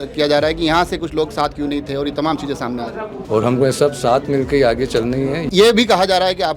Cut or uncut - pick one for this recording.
cut